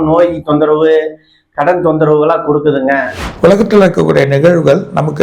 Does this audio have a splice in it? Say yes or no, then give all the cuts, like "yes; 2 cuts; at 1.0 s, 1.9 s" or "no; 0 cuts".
yes; 1 cut; at 3.2 s